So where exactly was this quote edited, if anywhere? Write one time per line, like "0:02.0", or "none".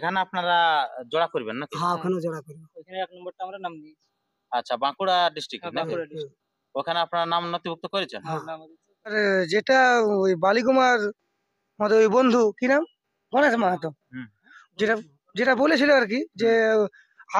0:08.9